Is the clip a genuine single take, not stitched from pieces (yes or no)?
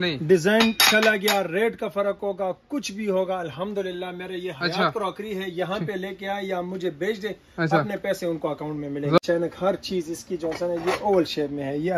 no